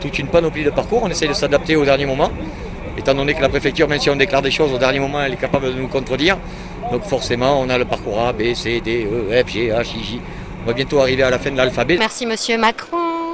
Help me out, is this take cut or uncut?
cut